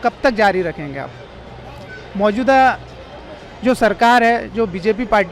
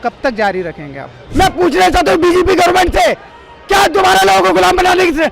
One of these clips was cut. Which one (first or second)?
second